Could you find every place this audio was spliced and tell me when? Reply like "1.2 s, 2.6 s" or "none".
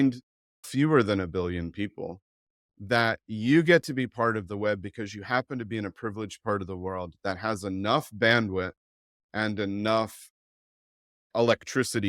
none